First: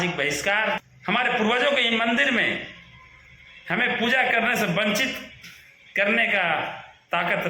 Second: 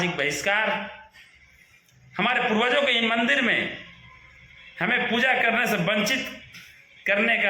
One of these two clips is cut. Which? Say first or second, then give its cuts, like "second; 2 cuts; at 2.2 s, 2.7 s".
first; 1 cut; at 0.9 s